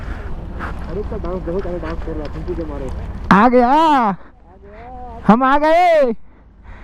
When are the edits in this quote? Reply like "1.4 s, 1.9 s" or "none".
none